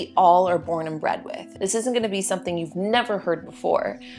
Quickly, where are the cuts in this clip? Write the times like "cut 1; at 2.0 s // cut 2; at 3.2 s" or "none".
cut 1; at 1.4 s